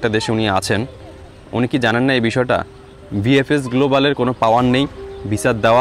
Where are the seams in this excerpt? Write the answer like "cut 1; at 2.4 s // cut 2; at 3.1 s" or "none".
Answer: none